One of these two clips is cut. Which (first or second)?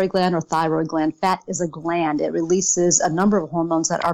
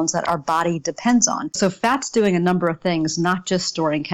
second